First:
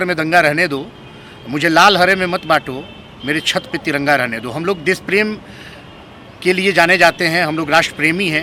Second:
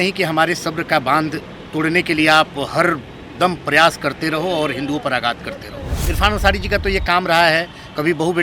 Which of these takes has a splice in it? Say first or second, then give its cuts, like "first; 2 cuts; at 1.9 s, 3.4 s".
second; 1 cut; at 6.0 s